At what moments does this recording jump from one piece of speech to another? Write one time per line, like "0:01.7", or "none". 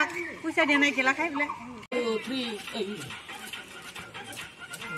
0:01.9